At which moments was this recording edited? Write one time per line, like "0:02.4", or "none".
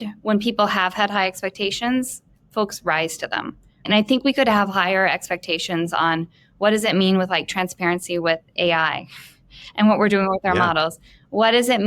0:03.8